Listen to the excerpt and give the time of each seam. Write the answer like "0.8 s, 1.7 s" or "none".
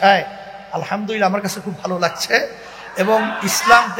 none